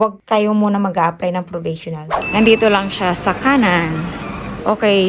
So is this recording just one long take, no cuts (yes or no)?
no